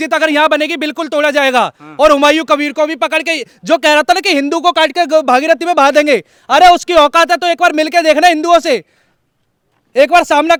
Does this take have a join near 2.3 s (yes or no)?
no